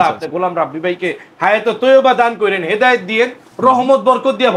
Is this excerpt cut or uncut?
uncut